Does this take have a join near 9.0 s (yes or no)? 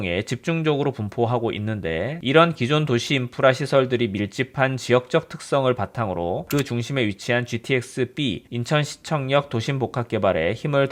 no